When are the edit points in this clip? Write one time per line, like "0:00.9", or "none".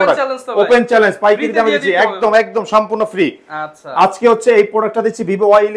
none